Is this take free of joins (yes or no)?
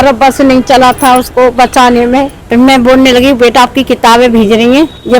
no